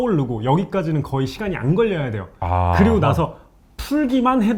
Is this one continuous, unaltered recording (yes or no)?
yes